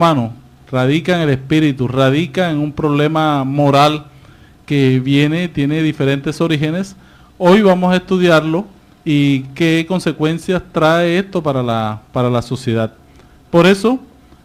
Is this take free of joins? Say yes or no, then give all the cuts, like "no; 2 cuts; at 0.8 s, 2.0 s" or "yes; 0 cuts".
yes; 0 cuts